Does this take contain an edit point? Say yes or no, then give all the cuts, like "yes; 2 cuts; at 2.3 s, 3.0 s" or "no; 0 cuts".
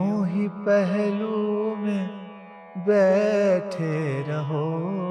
no; 0 cuts